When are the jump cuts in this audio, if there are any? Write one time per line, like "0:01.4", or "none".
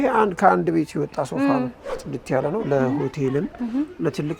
0:01.9